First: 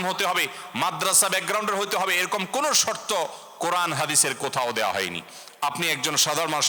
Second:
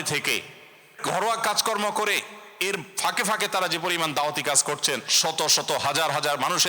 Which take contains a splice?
second; 1 cut; at 1.0 s

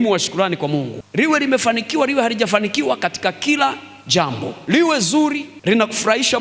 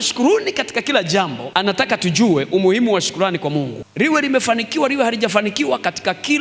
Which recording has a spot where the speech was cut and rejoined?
first; 2 cuts; at 4.5 s, 5.5 s

